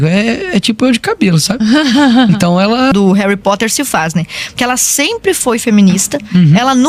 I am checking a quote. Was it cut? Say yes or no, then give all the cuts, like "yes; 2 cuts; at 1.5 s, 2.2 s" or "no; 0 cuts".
yes; 1 cut; at 2.9 s